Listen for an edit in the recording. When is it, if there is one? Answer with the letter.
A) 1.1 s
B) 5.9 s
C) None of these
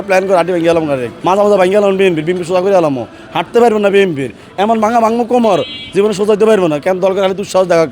A